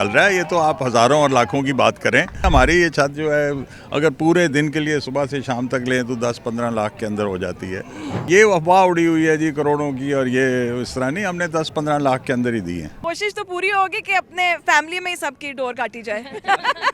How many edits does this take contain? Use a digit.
3